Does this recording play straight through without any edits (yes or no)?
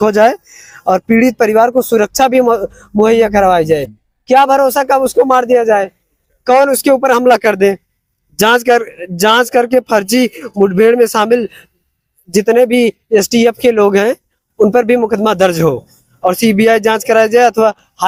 yes